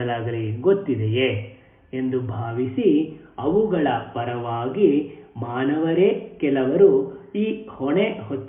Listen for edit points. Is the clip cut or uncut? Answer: cut